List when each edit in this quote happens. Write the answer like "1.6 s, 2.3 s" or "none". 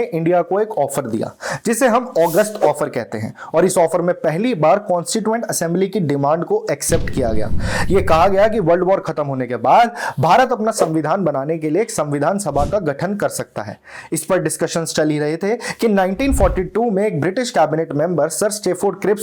none